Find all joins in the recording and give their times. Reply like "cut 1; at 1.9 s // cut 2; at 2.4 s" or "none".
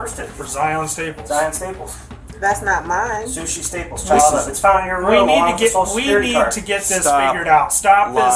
none